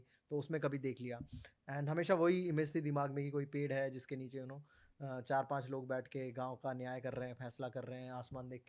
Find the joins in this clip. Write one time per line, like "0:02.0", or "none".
none